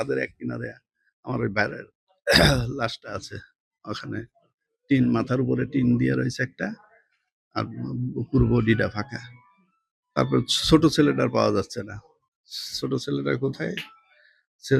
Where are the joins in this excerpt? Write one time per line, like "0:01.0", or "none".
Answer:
none